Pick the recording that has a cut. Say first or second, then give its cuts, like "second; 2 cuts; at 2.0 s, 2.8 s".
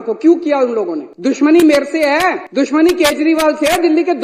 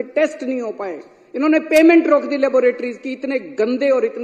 first; 2 cuts; at 1.0 s, 2.4 s